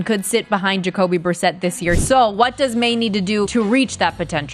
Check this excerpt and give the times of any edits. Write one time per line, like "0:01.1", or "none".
0:02.0
0:03.5